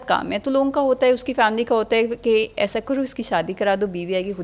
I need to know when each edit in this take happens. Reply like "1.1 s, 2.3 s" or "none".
none

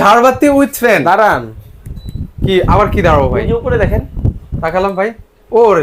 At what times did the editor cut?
none

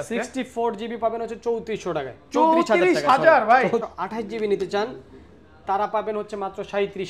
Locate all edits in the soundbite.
3.8 s

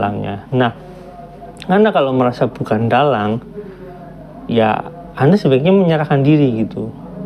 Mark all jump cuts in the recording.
none

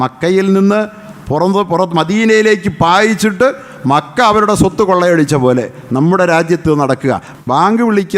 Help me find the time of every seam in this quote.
7.3 s

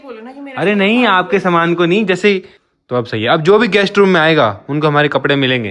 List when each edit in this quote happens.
2.6 s

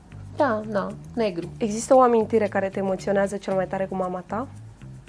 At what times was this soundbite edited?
1.5 s

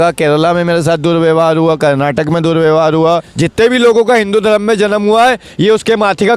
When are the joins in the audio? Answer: 3.4 s

